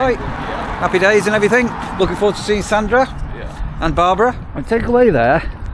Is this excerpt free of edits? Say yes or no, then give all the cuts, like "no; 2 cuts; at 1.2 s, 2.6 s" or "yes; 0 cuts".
no; 1 cut; at 4.5 s